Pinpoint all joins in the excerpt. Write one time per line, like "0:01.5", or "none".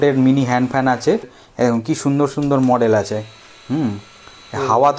0:01.3